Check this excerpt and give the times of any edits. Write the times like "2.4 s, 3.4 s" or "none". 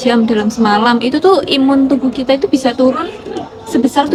none